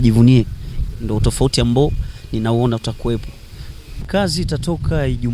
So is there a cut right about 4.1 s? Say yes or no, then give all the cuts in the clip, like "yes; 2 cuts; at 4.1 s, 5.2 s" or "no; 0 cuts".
yes; 1 cut; at 4.1 s